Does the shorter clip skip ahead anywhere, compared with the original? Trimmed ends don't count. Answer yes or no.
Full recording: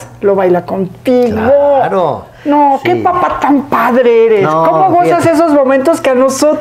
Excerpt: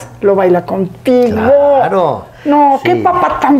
no